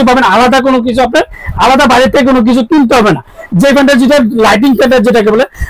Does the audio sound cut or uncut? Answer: uncut